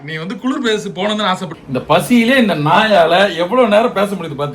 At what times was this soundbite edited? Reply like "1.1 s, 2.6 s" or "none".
1.5 s